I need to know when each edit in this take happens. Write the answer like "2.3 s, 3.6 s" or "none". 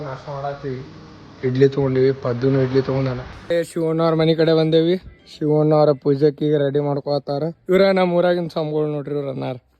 3.5 s, 7.6 s